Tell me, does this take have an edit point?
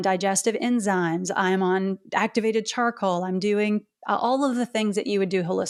no; 0 cuts

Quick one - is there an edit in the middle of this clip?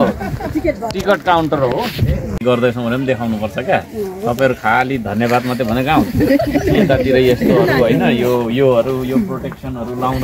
yes; 1 cut; at 2.3 s

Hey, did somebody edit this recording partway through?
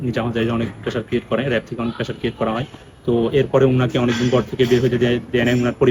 no; 0 cuts

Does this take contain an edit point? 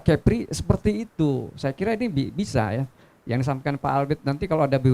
no; 0 cuts

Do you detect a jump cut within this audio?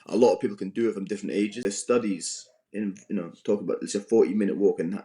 yes; 1 cut; at 1.6 s

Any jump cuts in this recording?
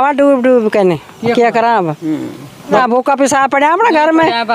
yes; 1 cut; at 2.8 s

